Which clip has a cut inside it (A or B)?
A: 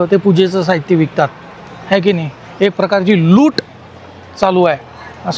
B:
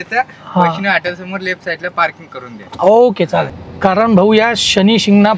B